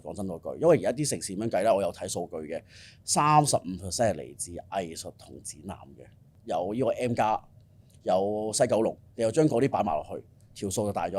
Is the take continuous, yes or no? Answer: yes